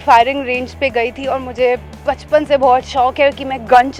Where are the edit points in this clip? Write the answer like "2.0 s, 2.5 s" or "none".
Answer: none